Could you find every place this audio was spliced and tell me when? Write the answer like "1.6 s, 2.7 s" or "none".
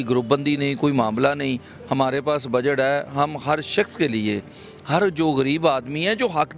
none

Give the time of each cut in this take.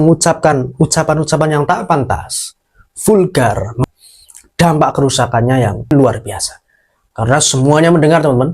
3.8 s, 5.9 s

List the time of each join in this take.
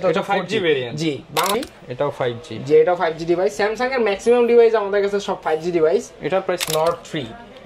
1.6 s, 6.7 s

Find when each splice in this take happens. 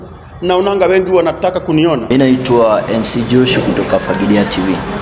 2.0 s

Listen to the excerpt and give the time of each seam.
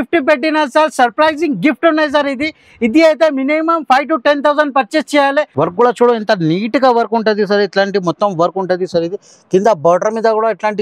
5.5 s

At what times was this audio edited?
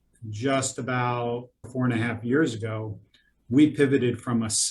1.7 s

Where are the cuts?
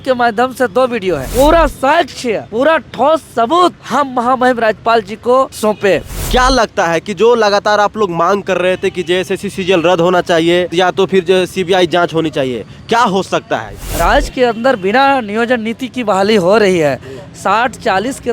1.3 s, 2.4 s, 3.8 s, 5.9 s, 10.7 s, 13.8 s

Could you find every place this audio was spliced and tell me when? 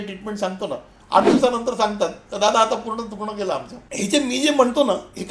3.8 s

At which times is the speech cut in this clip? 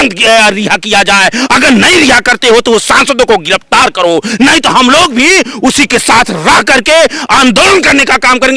none

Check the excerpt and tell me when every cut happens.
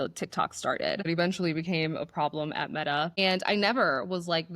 1.1 s

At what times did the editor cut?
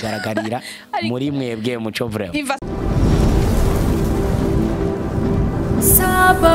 2.6 s

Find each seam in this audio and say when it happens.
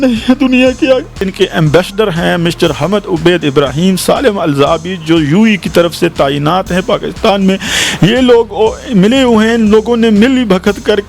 1.3 s

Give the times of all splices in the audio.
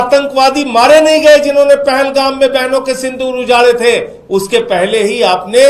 none

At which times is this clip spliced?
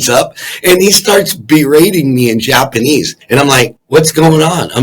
3.2 s

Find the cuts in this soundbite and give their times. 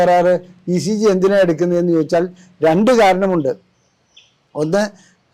none

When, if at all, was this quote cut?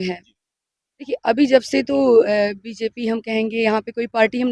none

